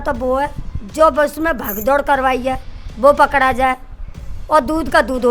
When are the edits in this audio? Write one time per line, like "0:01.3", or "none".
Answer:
none